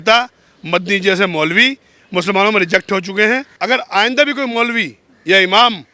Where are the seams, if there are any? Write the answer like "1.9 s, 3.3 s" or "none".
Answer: 3.5 s

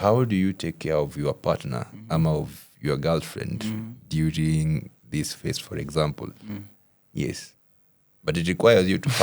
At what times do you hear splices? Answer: none

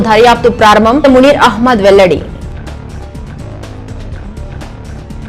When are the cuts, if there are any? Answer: 2.4 s

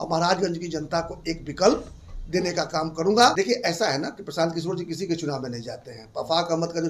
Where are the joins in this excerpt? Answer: 3.3 s

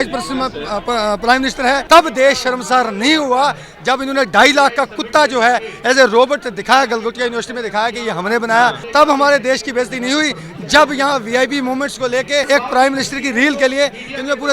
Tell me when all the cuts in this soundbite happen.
1.8 s, 8.8 s, 12.5 s

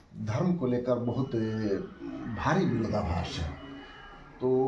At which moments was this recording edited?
none

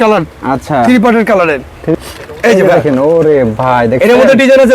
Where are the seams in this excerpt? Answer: 1.9 s

